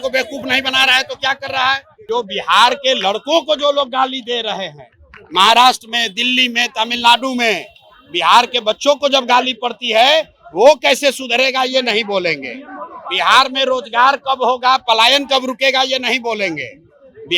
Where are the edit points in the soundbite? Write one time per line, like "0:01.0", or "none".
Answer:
0:01.9